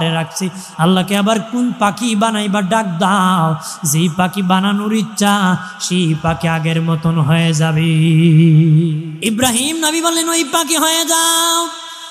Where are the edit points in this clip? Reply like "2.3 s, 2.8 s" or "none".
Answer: 9.1 s